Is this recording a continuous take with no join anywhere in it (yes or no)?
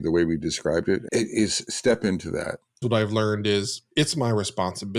no